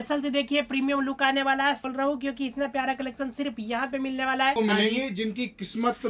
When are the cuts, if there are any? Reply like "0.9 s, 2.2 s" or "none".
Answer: 1.8 s, 4.5 s